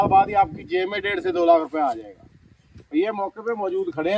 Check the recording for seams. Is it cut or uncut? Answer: uncut